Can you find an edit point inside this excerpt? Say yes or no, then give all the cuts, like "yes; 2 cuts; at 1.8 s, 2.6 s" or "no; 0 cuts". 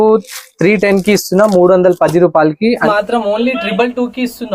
yes; 1 cut; at 2.8 s